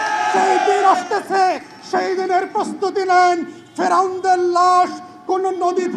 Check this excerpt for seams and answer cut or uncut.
uncut